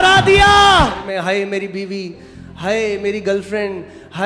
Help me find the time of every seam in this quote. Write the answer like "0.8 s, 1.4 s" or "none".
1.0 s